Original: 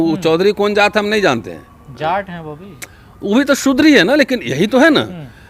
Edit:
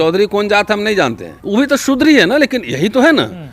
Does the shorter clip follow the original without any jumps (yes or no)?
no